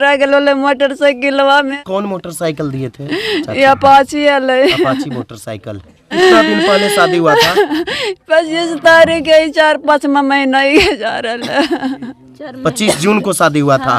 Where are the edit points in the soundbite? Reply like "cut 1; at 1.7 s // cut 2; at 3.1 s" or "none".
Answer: cut 1; at 1.8 s // cut 2; at 6.1 s